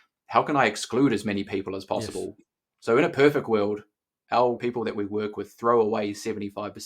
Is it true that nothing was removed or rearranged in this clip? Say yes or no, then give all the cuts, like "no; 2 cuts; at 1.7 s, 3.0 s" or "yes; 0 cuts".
no; 1 cut; at 4.6 s